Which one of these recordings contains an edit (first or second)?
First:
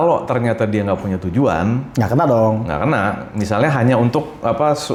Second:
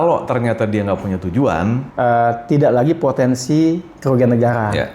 second